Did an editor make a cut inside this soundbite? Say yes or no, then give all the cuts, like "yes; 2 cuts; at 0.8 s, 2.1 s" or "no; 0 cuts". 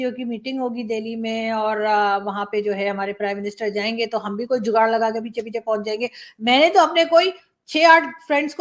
no; 0 cuts